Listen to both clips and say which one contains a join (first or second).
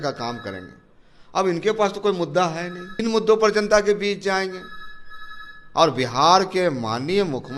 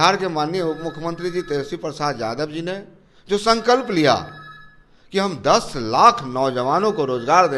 first